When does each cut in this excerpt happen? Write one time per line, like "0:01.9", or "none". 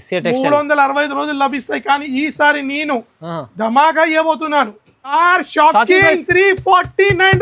0:05.1